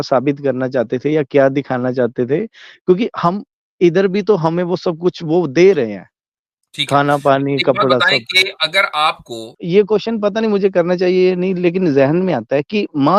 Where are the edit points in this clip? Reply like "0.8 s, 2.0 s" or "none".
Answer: 9.5 s